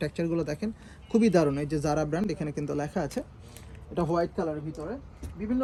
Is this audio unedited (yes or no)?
yes